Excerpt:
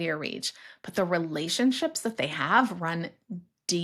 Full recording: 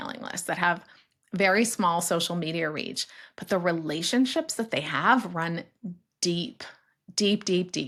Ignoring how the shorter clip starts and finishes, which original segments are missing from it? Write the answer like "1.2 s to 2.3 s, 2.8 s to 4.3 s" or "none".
none